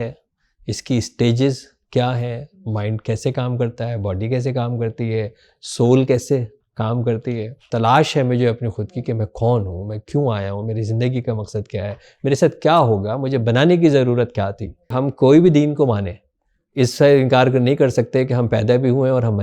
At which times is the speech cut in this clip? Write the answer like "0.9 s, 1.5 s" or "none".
7.7 s, 15.0 s